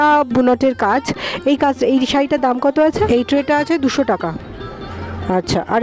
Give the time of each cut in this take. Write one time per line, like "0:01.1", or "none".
0:03.1